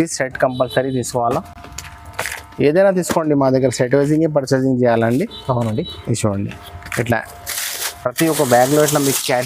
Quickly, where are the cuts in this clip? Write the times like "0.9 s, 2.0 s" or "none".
none